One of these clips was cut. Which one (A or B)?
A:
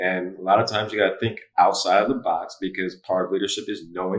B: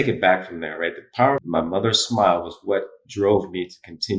B